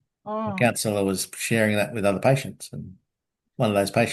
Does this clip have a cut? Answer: no; 0 cuts

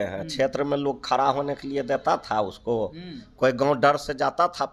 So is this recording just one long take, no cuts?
yes; 0 cuts

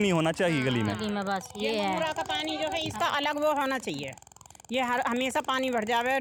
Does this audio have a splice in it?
no; 0 cuts

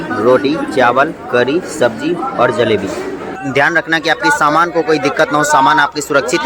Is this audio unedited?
no; 1 cut; at 3.3 s

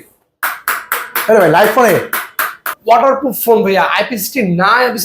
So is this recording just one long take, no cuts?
no; 1 cut; at 2.7 s

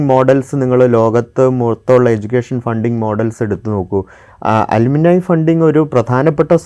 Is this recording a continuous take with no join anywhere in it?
yes; 0 cuts

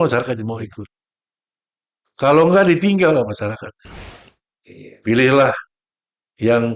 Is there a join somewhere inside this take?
yes; 1 cut; at 4.2 s

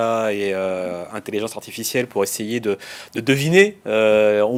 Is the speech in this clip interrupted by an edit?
no; 0 cuts

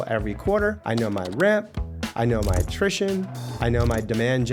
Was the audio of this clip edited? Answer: no; 0 cuts

